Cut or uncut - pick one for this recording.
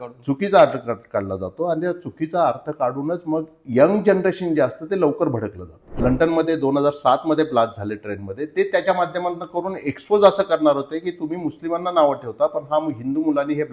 cut